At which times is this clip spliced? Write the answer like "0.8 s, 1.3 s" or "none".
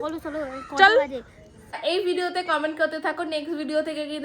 1.8 s